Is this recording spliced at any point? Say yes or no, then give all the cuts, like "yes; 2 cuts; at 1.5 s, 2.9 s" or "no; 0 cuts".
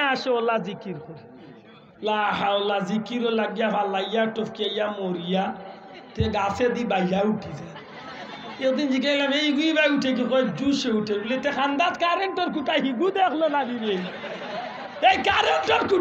no; 0 cuts